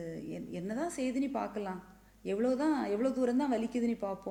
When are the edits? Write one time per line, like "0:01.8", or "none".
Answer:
none